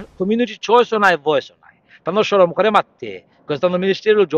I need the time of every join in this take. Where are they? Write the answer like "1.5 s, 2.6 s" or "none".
none